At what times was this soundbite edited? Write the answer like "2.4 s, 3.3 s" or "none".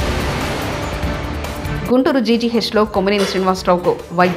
none